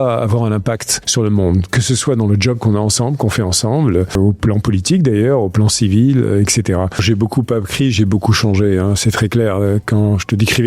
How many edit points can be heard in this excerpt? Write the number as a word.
three